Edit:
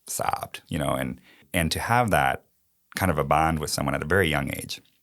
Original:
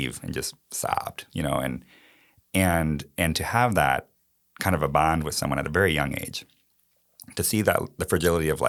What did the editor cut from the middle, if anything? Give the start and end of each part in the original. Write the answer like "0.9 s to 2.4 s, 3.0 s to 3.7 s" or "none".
2.1 s to 3.1 s